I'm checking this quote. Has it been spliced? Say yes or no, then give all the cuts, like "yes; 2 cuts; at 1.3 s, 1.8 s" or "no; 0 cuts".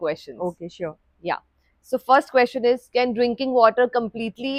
no; 0 cuts